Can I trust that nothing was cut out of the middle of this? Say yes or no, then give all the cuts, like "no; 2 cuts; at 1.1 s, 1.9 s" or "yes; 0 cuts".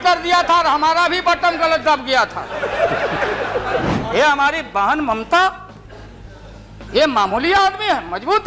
no; 1 cut; at 3.9 s